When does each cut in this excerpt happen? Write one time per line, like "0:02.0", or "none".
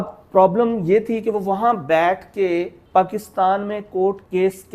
0:02.8